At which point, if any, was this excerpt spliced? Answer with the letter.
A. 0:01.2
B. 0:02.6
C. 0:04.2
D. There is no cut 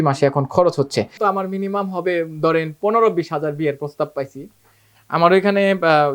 A